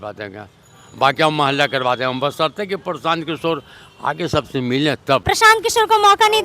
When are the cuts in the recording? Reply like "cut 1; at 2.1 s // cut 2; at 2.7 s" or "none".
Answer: cut 1; at 5.2 s